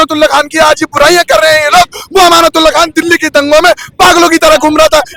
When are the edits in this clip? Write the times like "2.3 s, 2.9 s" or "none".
none